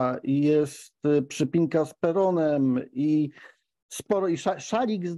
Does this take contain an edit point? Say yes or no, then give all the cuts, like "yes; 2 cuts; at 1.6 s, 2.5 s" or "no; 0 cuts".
no; 0 cuts